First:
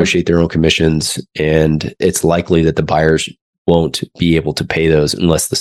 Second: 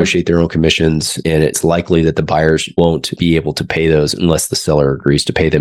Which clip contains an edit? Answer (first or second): second